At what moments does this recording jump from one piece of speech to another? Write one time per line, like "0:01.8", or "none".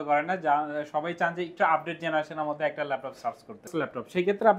0:03.7